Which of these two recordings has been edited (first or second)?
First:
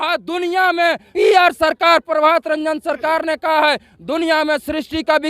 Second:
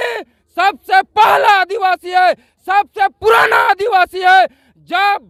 first